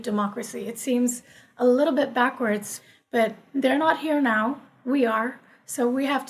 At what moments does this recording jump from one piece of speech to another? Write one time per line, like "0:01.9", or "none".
0:02.7